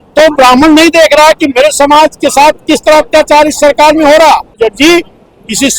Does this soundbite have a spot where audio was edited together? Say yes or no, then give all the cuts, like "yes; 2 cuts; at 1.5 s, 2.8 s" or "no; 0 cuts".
yes; 1 cut; at 4.6 s